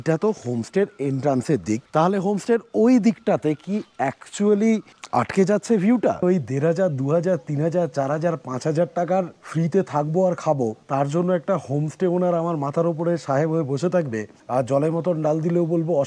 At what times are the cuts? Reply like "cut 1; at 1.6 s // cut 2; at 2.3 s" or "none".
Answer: cut 1; at 1.8 s // cut 2; at 5.0 s // cut 3; at 6.2 s // cut 4; at 9.4 s // cut 5; at 10.8 s // cut 6; at 14.3 s